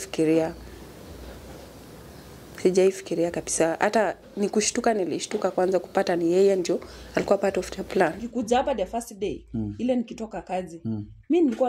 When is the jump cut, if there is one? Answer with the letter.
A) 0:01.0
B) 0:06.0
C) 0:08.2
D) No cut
C